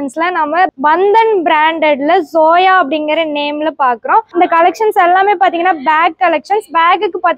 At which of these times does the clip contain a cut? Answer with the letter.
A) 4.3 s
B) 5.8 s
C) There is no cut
A